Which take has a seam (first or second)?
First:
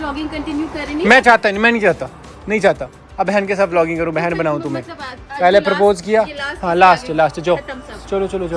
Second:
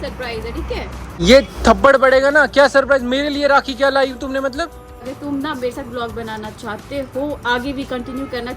second